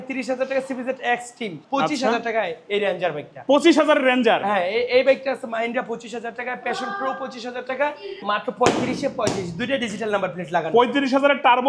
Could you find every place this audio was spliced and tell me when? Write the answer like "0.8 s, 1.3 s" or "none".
1.6 s, 8.2 s